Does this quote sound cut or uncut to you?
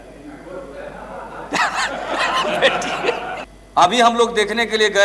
cut